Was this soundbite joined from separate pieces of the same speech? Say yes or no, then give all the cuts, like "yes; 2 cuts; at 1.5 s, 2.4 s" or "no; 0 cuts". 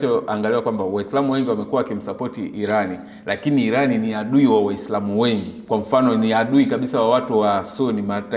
no; 0 cuts